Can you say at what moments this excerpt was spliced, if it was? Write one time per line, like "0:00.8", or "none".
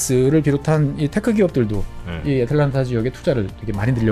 none